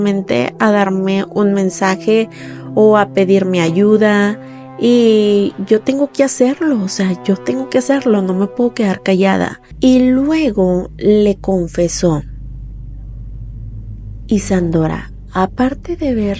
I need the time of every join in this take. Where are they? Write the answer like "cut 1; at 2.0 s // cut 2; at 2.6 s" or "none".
cut 1; at 9.6 s